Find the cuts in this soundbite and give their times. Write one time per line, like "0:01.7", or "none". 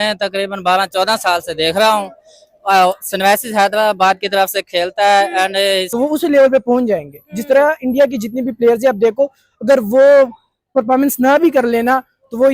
0:05.9